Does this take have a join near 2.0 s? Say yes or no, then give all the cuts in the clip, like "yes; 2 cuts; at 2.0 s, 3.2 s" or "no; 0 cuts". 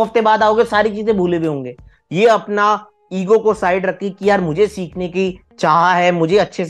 yes; 1 cut; at 2.0 s